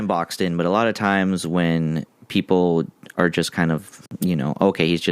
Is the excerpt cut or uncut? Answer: cut